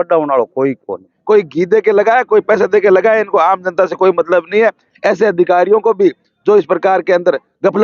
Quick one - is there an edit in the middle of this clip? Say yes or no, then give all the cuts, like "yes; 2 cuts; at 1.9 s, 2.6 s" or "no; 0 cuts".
yes; 1 cut; at 1.1 s